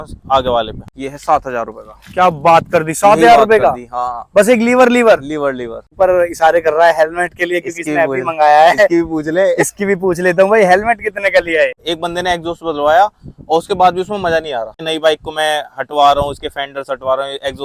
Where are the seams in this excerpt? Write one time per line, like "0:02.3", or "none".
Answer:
0:00.9
0:05.9
0:11.9
0:14.8